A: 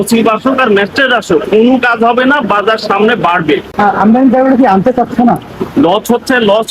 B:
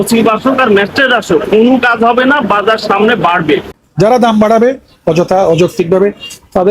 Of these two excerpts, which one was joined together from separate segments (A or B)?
B